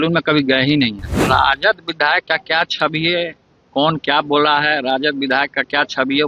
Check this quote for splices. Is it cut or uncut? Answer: cut